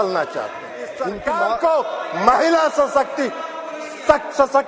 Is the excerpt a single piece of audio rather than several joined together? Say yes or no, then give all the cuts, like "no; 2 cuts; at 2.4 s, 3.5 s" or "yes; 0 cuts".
no; 1 cut; at 1.0 s